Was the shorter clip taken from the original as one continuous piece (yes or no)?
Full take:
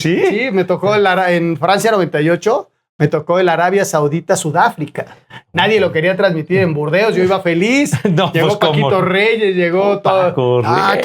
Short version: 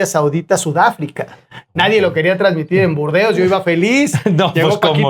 yes